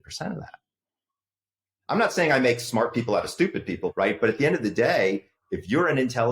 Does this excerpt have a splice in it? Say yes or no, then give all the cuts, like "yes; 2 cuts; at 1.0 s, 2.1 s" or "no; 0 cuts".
yes; 1 cut; at 3.9 s